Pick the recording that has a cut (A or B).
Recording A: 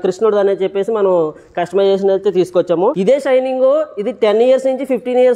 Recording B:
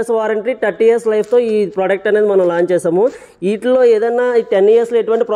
A